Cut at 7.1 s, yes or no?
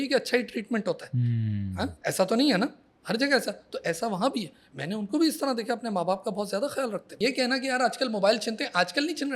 yes